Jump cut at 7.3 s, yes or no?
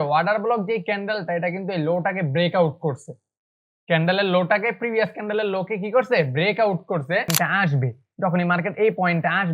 yes